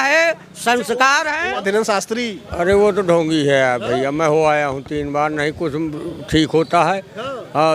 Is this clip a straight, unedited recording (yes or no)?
no